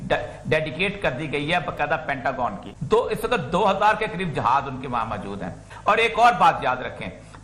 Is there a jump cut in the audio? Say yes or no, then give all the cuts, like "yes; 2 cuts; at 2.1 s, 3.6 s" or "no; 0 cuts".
yes; 2 cuts; at 2.7 s, 5.7 s